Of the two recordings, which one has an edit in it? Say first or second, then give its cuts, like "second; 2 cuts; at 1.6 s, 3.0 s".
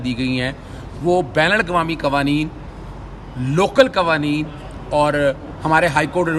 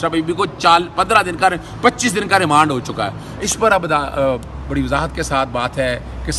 second; 1 cut; at 3.3 s